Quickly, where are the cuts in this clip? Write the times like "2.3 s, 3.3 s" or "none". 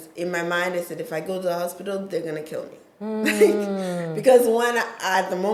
none